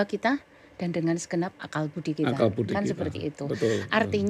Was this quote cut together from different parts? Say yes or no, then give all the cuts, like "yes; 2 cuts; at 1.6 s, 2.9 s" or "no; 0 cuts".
no; 0 cuts